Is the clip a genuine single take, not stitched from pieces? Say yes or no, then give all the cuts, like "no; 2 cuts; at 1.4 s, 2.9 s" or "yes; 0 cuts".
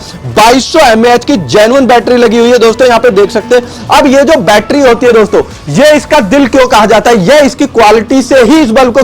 yes; 0 cuts